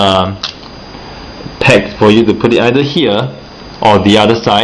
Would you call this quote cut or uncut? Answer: uncut